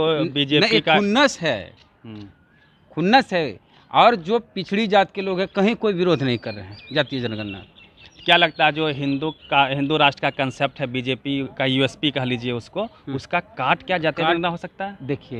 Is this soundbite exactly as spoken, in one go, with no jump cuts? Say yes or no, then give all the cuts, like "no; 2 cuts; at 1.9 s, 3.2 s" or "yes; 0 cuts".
yes; 0 cuts